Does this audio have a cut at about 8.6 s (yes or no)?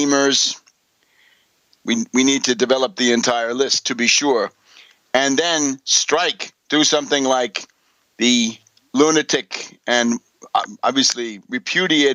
no